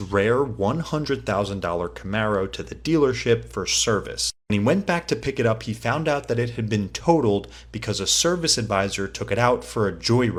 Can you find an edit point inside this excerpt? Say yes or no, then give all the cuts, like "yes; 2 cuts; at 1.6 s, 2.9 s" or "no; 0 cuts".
no; 0 cuts